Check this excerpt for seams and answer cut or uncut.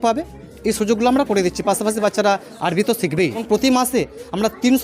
cut